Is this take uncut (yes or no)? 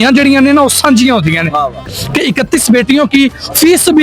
no